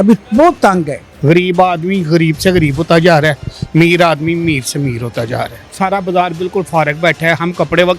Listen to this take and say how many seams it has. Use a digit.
2